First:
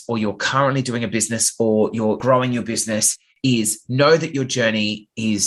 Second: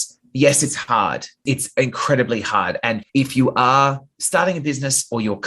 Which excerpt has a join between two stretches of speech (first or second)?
second